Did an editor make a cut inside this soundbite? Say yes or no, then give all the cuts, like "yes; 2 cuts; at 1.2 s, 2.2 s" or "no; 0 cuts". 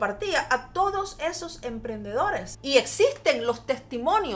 yes; 1 cut; at 2.5 s